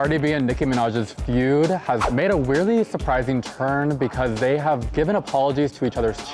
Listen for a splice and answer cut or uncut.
cut